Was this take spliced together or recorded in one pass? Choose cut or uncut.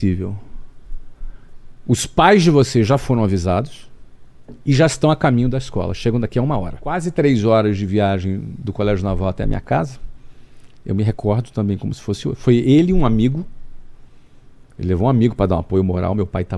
cut